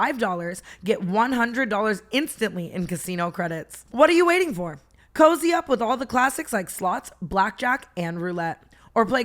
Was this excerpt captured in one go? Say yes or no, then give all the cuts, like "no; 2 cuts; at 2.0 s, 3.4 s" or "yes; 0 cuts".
no; 1 cut; at 3.8 s